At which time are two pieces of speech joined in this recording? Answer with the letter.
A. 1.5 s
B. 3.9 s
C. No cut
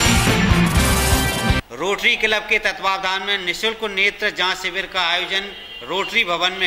A